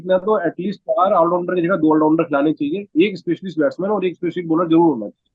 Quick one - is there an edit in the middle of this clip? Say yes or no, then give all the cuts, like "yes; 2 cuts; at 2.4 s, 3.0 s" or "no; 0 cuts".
no; 0 cuts